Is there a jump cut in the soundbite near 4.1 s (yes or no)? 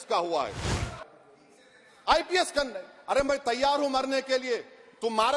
no